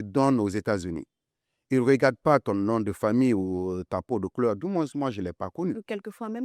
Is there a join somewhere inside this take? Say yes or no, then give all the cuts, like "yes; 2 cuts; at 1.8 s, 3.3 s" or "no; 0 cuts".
no; 0 cuts